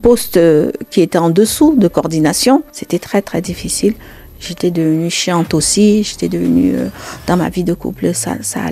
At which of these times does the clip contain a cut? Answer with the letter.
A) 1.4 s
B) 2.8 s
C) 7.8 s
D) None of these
B